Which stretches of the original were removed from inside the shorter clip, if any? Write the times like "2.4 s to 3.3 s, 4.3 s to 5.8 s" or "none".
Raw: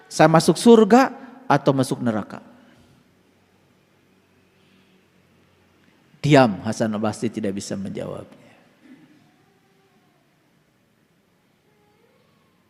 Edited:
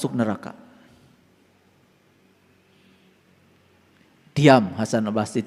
none